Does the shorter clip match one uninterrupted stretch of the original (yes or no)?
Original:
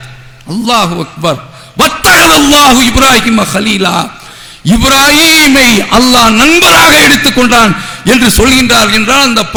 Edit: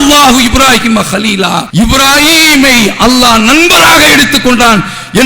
no